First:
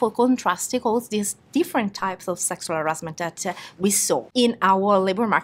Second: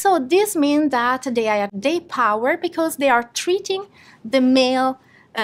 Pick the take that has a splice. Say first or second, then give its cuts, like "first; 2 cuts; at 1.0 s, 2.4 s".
first; 1 cut; at 4.3 s